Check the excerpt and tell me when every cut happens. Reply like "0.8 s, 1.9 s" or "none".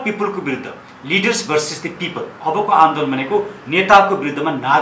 none